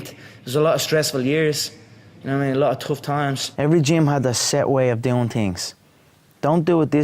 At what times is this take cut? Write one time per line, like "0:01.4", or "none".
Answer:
0:03.4

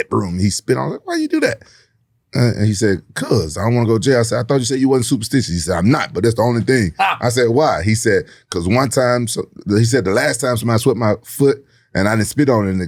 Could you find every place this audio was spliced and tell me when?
none

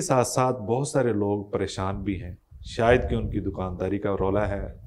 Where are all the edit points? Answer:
none

